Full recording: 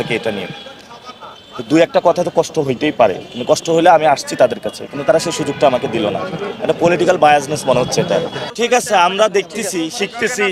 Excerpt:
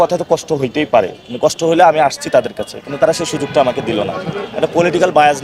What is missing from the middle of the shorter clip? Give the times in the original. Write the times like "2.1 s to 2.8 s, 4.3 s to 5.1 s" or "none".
none